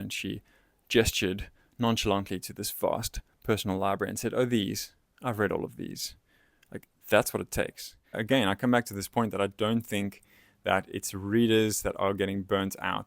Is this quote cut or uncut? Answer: cut